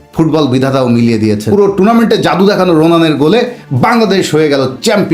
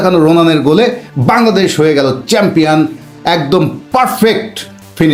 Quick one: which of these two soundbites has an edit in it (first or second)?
first